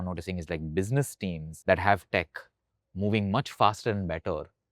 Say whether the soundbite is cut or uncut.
cut